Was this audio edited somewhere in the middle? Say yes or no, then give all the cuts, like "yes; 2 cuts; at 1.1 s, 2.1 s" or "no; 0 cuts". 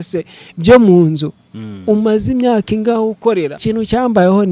yes; 1 cut; at 3.6 s